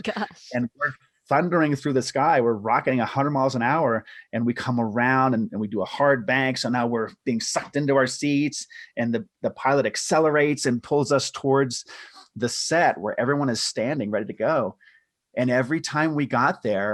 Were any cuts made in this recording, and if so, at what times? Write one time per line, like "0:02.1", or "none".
none